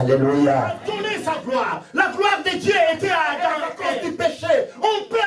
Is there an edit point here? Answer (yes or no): yes